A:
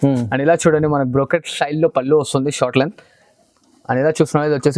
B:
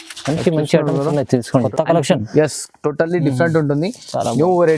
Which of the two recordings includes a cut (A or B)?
B